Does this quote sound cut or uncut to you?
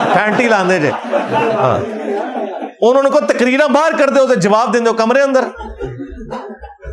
uncut